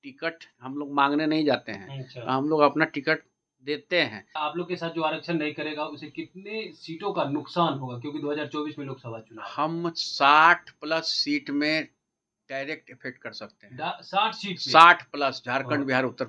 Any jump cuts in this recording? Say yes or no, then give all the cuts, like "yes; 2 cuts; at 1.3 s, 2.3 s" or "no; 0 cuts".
yes; 1 cut; at 4.4 s